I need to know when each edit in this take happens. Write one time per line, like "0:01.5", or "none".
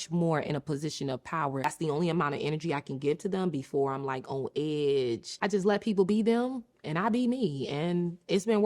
0:01.6
0:05.4